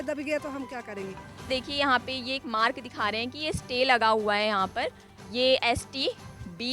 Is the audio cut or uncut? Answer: cut